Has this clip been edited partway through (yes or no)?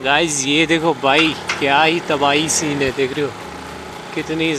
no